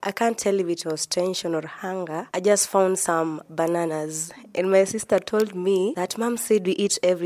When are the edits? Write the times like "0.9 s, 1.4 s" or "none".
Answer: none